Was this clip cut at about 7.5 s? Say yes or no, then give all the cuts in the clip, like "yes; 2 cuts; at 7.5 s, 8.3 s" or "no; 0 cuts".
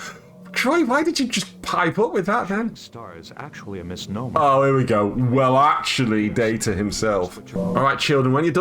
yes; 1 cut; at 7.5 s